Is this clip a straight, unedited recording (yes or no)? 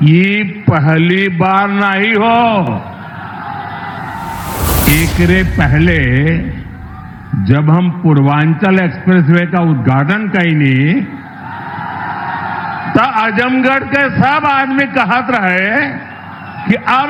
yes